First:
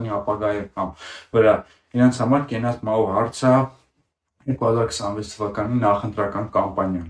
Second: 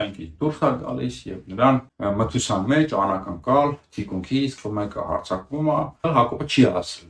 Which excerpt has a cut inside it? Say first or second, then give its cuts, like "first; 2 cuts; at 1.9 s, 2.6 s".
second; 3 cuts; at 1.9 s, 4.5 s, 6.0 s